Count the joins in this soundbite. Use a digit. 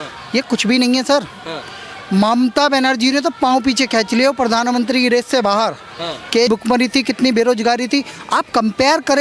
1